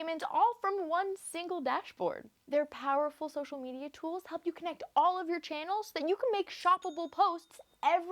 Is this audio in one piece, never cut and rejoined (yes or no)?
no